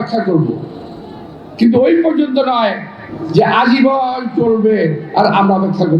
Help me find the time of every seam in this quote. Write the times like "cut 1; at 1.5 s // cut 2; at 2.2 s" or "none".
none